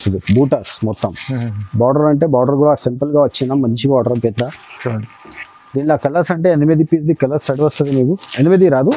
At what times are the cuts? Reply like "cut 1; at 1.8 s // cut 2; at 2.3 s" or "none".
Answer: none